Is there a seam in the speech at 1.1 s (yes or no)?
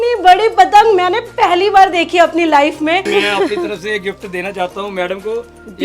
no